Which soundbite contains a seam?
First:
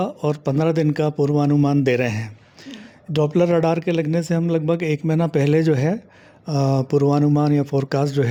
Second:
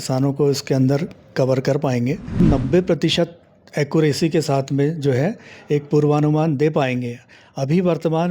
second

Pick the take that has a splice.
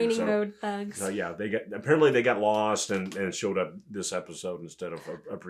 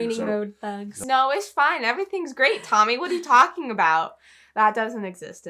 second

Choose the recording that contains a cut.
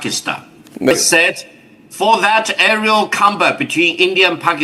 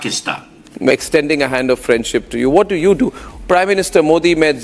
first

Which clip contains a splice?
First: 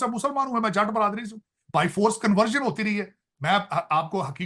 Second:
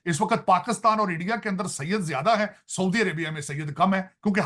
first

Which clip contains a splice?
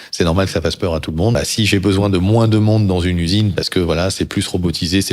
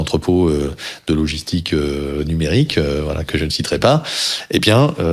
first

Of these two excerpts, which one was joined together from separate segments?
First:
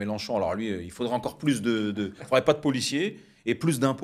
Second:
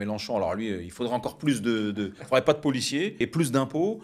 second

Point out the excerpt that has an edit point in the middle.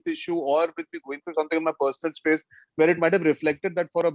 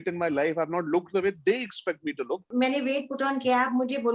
second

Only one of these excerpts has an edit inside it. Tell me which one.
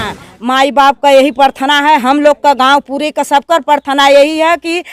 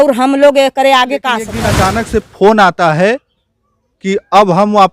second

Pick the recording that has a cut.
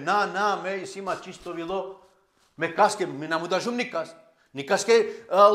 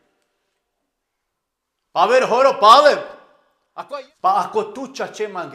second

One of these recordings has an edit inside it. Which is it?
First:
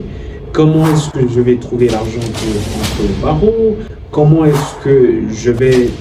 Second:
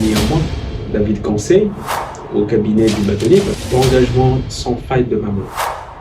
second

